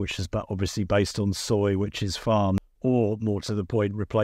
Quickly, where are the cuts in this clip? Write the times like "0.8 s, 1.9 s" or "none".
2.7 s